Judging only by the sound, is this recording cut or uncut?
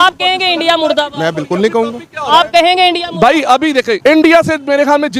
cut